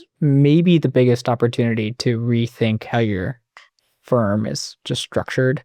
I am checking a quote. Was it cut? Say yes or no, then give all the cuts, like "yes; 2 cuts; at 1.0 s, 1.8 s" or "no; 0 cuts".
no; 0 cuts